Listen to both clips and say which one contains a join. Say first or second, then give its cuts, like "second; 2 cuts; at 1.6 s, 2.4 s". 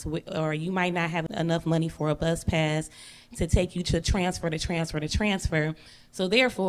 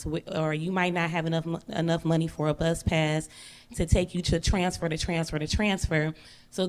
first; 1 cut; at 1.2 s